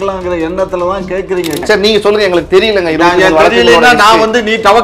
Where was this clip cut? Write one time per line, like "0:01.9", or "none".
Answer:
0:01.6

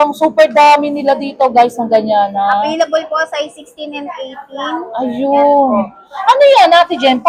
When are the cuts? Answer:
none

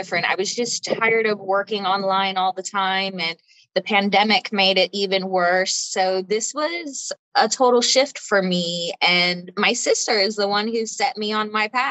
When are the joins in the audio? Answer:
none

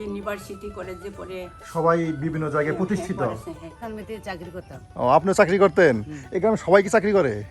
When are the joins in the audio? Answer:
0:03.8

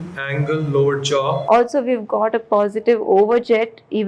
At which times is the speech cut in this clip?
0:01.4

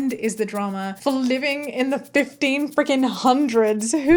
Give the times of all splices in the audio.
none

